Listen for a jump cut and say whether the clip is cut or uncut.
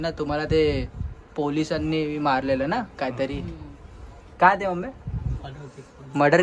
uncut